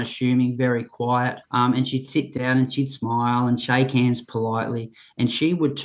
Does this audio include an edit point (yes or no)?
yes